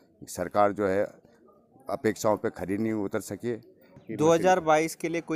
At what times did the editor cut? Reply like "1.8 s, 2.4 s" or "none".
none